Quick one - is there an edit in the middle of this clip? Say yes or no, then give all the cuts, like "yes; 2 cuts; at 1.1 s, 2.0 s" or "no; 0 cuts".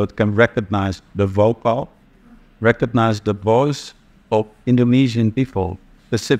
no; 0 cuts